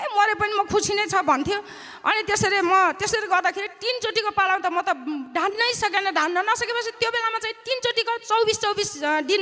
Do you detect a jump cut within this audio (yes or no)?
no